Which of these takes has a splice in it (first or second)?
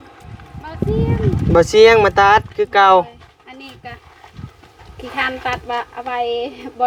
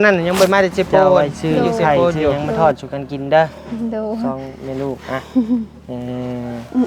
second